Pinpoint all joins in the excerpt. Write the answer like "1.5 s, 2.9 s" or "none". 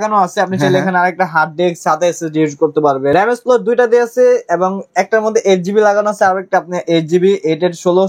3.1 s